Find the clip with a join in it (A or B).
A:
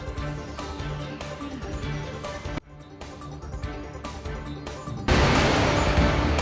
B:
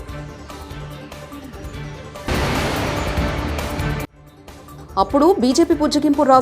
B